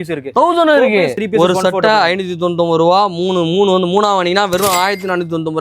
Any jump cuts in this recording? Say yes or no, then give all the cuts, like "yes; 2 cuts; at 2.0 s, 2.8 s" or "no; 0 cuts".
yes; 1 cut; at 1.1 s